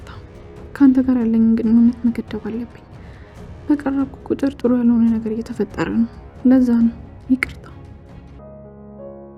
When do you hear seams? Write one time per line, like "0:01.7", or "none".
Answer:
0:08.4